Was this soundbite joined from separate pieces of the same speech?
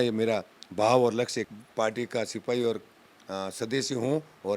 yes; 1 cut; at 1.5 s

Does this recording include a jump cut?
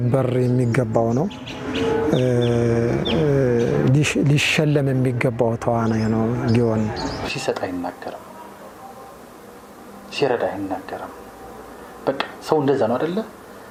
no; 0 cuts

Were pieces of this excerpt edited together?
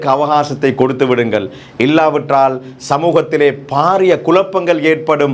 no; 0 cuts

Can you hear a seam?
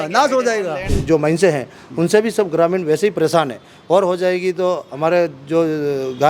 yes; 1 cut; at 0.9 s

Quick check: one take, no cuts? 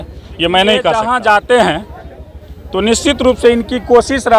no; 1 cut; at 1.0 s

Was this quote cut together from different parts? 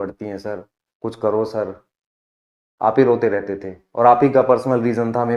no; 0 cuts

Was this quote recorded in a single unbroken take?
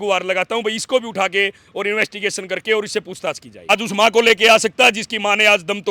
no; 1 cut; at 3.6 s

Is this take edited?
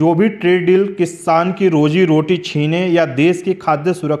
no; 0 cuts

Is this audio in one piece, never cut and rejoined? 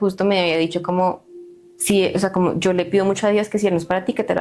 yes; 0 cuts

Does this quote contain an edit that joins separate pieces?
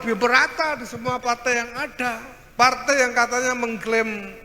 yes; 1 cut; at 2.3 s

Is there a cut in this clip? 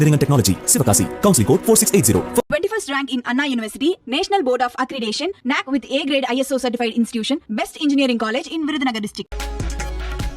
yes; 1 cut; at 9.3 s

